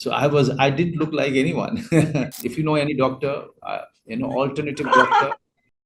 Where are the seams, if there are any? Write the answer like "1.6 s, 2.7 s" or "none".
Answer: 2.4 s